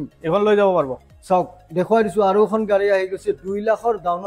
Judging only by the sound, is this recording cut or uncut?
uncut